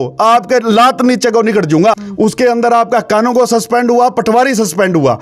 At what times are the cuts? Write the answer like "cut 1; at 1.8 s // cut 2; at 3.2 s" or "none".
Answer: cut 1; at 2.0 s